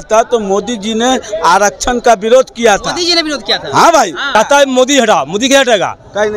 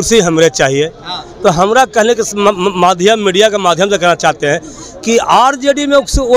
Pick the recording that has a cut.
first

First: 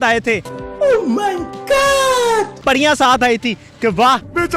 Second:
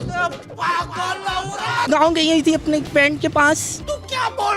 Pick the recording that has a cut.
second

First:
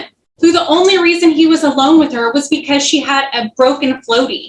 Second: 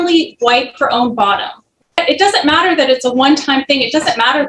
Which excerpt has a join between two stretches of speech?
second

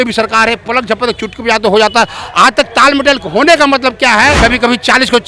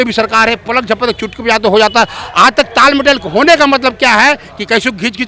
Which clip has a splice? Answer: first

